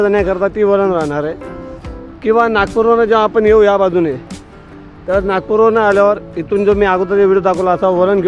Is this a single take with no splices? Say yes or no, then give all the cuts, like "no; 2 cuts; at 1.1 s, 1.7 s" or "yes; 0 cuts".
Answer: yes; 0 cuts